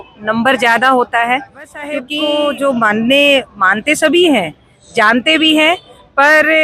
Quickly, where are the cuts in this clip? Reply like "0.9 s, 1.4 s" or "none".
2.1 s